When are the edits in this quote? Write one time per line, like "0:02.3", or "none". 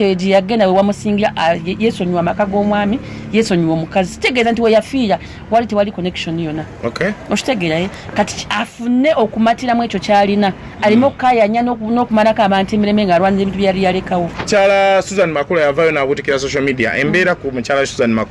0:14.5

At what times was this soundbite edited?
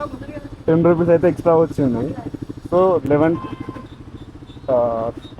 none

